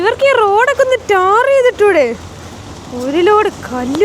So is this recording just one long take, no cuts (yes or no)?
yes